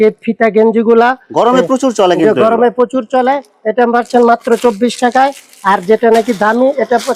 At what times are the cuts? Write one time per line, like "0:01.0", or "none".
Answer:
none